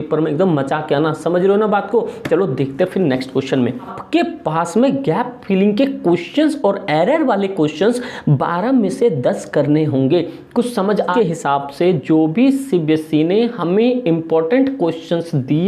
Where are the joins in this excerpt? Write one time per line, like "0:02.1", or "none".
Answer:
0:04.0
0:11.1